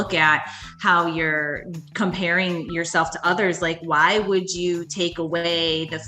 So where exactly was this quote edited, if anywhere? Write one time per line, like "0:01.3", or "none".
none